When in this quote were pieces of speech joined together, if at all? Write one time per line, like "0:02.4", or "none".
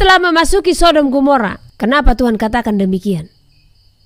0:01.6